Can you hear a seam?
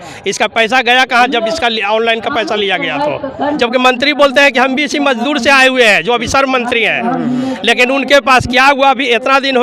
yes; 1 cut; at 3.6 s

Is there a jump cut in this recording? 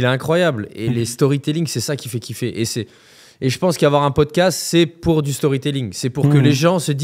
no; 0 cuts

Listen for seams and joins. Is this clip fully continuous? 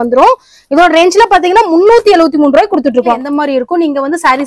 no; 1 cut; at 3.2 s

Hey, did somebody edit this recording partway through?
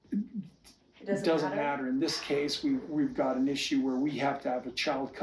no; 0 cuts

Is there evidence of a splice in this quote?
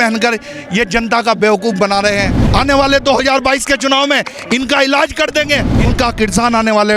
yes; 2 cuts; at 2.4 s, 5.7 s

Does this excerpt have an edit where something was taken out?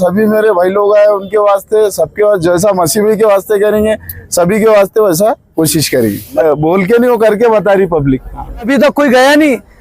yes; 2 cuts; at 6.4 s, 8.7 s

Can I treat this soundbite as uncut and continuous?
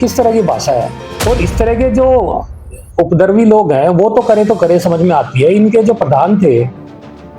no; 1 cut; at 1.0 s

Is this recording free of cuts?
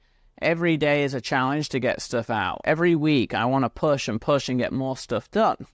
no; 1 cut; at 2.5 s

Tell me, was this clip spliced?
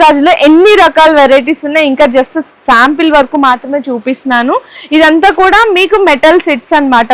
no; 0 cuts

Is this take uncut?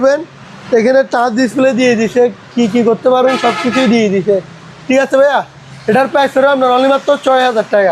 yes; 0 cuts

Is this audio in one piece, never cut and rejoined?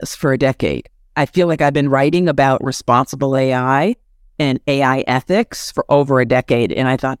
yes; 0 cuts

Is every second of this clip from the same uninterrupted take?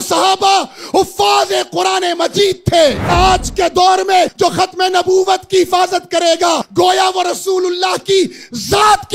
no; 3 cuts; at 3.1 s, 4.3 s, 6.6 s

